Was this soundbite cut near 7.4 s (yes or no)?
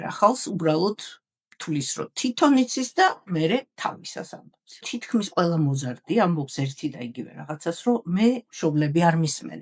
no